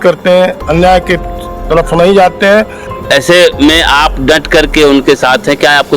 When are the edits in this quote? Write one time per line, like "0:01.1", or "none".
0:02.8